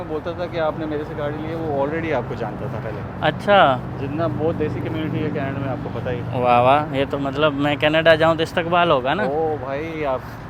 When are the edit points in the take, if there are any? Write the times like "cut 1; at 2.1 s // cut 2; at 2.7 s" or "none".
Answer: none